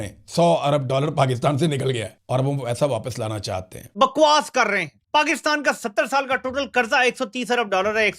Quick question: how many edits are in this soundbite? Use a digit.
1